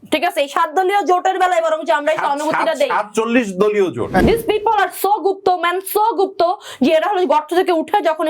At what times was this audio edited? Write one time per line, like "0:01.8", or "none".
0:04.2